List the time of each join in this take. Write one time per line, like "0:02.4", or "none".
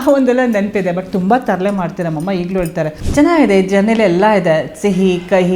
0:03.0